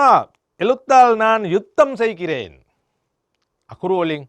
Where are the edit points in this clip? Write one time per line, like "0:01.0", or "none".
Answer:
none